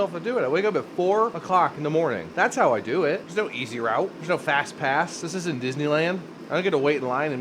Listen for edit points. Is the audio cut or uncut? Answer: cut